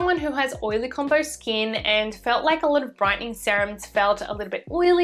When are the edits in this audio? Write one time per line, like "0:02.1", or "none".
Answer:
none

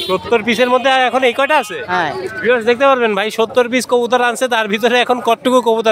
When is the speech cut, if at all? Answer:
none

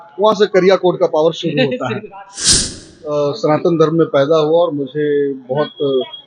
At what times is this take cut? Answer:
0:02.4

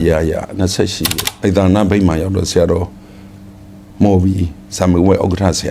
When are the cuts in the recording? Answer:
0:01.0

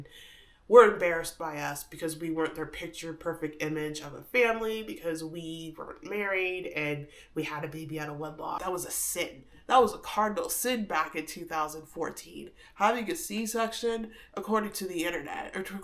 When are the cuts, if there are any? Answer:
0:08.6

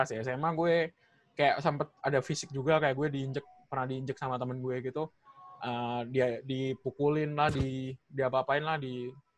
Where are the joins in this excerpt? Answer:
none

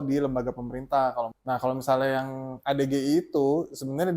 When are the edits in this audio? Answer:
0:01.4

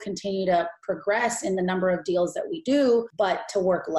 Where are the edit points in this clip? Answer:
0:03.1

